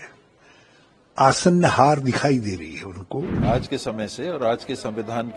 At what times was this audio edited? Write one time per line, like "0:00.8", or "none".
0:03.3